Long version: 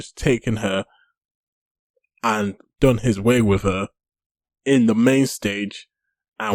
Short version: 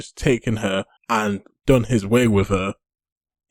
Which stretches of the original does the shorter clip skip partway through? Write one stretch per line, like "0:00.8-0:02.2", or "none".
0:00.9-0:02.1